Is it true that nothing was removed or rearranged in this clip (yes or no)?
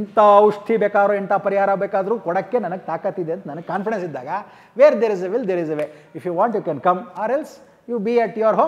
yes